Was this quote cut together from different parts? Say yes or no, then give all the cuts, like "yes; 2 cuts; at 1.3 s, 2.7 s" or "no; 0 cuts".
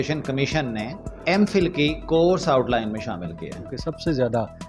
yes; 2 cuts; at 1.0 s, 3.7 s